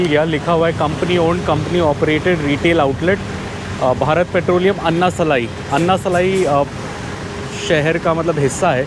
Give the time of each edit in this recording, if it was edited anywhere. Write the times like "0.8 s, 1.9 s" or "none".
none